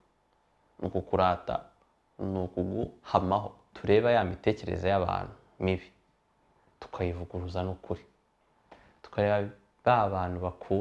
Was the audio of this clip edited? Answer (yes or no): yes